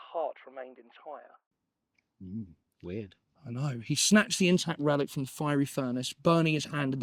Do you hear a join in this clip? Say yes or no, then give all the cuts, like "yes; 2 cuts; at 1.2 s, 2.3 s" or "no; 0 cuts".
no; 0 cuts